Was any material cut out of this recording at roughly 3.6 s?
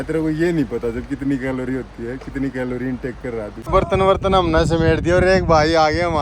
yes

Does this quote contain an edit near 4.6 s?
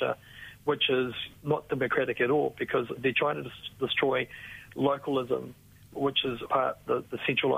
no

